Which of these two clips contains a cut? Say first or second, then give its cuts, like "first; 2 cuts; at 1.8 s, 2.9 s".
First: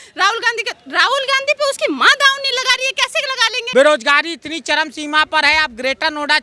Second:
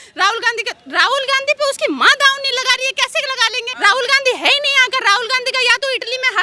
first; 1 cut; at 3.5 s